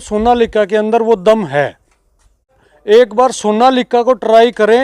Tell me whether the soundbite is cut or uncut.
cut